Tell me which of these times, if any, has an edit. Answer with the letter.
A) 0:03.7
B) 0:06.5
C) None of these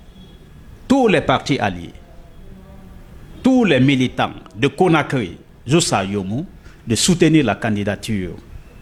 C